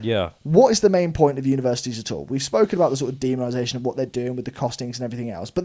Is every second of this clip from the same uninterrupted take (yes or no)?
yes